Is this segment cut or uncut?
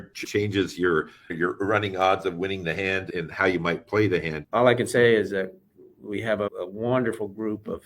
cut